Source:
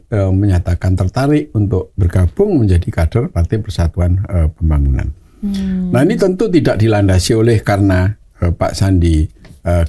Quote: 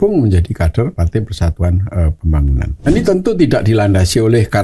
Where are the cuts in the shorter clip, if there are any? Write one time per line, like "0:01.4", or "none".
0:02.9